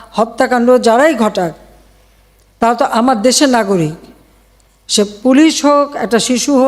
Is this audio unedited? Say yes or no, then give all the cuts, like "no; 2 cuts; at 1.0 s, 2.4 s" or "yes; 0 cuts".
yes; 0 cuts